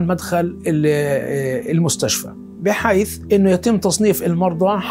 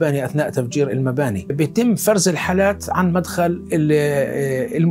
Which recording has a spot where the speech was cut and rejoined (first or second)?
second